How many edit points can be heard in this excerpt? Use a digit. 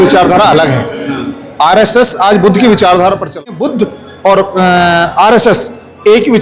1